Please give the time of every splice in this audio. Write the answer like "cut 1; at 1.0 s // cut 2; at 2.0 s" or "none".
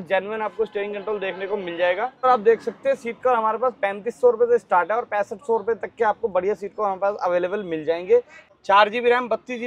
cut 1; at 2.2 s // cut 2; at 8.4 s